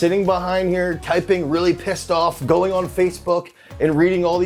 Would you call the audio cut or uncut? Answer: uncut